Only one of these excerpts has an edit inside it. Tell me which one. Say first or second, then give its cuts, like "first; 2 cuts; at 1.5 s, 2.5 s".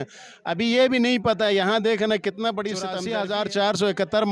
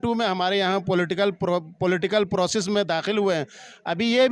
first; 1 cut; at 3.0 s